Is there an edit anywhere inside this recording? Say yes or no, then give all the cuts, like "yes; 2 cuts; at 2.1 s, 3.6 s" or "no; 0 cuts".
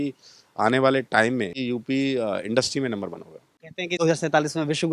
yes; 2 cuts; at 1.6 s, 4.0 s